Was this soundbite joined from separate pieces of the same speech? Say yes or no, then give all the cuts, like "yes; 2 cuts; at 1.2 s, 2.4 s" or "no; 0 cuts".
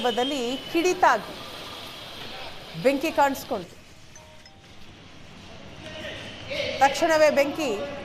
no; 0 cuts